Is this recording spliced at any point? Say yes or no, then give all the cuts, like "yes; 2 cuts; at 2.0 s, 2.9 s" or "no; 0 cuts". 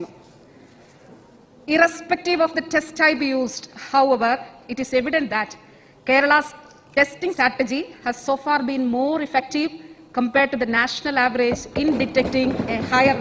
yes; 1 cut; at 7.3 s